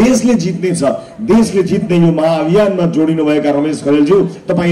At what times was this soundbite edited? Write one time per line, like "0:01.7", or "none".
none